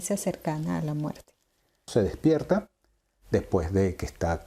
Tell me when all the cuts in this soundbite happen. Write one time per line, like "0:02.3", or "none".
0:01.8